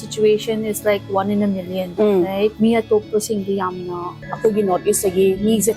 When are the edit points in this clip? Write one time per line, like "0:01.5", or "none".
0:01.8
0:02.5
0:04.2